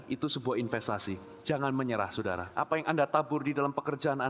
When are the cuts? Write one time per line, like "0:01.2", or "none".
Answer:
0:01.3
0:02.5